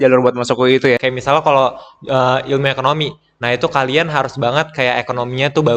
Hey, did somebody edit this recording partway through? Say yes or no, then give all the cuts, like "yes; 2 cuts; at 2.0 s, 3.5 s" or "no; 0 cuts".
yes; 1 cut; at 1.0 s